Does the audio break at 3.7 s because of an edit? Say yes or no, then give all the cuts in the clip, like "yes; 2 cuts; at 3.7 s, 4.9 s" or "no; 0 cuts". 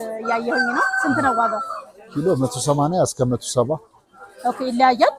no; 0 cuts